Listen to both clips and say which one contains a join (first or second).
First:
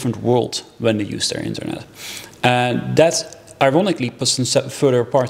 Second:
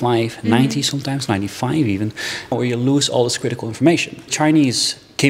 second